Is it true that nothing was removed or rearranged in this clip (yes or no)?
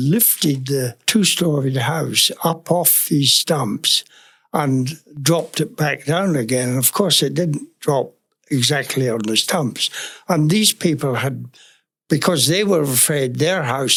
yes